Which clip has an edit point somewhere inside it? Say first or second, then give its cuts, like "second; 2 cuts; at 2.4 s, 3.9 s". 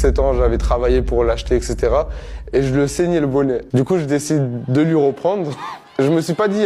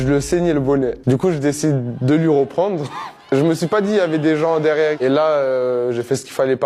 second; 1 cut; at 5.0 s